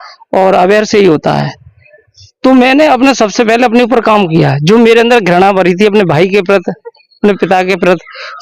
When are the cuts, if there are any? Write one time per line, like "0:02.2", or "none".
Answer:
none